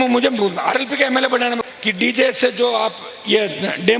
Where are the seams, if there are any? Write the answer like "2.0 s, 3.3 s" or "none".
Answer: 1.6 s